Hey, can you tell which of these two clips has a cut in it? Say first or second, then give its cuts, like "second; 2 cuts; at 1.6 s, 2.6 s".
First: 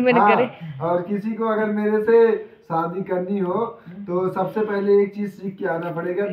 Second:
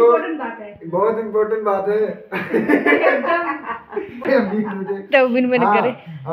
second; 1 cut; at 4.2 s